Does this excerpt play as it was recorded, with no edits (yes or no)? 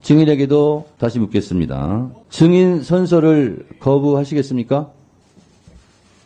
no